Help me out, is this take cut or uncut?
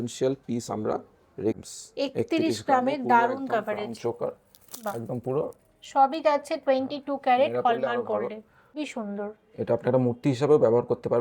cut